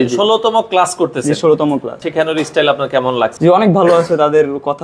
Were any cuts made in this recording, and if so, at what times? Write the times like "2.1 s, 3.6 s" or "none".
2.0 s, 3.3 s